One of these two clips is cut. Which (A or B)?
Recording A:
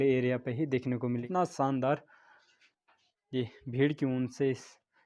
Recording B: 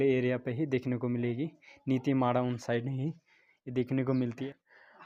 A